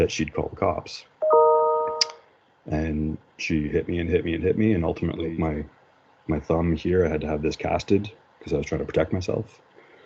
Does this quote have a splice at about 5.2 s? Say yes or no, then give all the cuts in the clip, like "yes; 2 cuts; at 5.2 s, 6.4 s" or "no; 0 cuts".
yes; 1 cut; at 5.2 s